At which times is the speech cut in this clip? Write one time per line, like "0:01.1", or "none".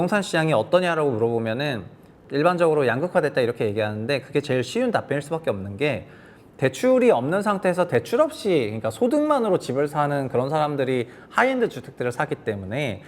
0:02.2